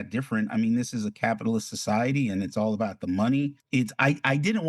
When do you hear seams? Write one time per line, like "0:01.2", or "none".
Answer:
0:03.6